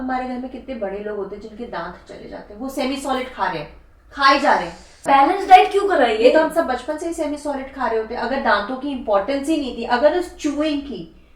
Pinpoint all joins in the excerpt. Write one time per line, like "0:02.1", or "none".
0:04.9